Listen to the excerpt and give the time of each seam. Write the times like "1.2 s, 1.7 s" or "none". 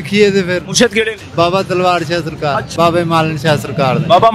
1.2 s, 2.7 s